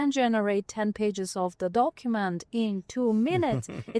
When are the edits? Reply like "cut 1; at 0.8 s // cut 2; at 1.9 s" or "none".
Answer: none